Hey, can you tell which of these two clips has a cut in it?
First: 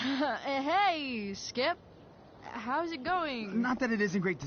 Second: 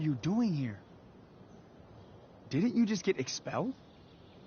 second; 3 cuts; at 0.8 s, 2.5 s, 3.8 s

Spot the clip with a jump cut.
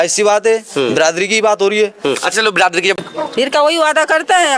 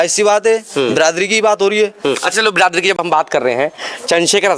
first; 1 cut; at 3.0 s

